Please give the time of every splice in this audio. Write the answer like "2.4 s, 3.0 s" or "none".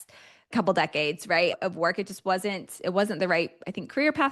none